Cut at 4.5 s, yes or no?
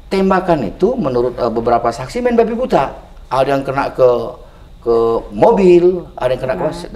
no